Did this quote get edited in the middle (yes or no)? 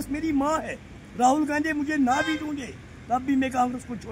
no